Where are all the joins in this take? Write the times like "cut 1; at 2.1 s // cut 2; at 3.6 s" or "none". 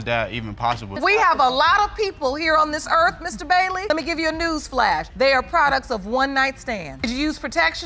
cut 1; at 1.0 s // cut 2; at 6.9 s